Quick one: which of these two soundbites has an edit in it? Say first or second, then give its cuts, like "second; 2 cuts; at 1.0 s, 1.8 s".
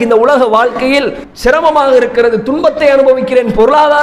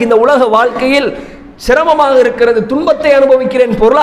first; 1 cut; at 1.2 s